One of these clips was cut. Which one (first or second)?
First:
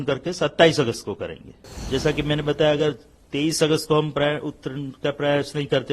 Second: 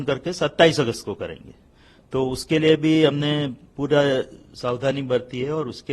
first